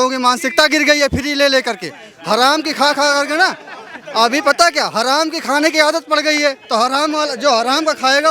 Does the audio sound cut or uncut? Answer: uncut